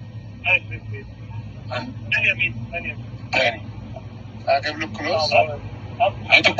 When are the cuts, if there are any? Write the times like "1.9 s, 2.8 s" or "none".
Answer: 2.2 s